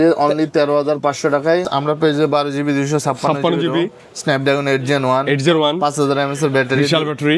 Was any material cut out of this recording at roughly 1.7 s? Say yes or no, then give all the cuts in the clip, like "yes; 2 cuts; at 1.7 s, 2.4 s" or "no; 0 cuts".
yes; 1 cut; at 1.7 s